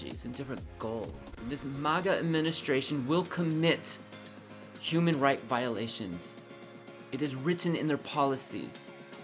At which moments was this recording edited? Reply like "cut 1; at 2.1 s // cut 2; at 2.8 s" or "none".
cut 1; at 1.4 s